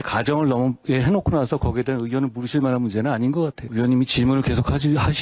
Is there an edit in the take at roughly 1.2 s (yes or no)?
no